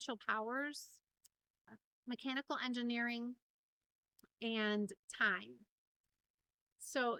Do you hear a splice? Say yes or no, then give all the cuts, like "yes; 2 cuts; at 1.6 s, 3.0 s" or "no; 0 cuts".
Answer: no; 0 cuts